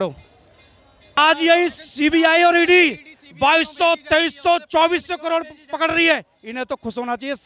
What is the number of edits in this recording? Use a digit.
1